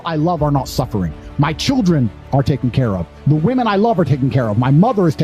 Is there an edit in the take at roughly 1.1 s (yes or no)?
no